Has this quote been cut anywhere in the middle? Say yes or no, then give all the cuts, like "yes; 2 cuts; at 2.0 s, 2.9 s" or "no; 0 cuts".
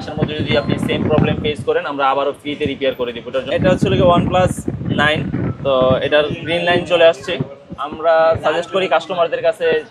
yes; 1 cut; at 3.5 s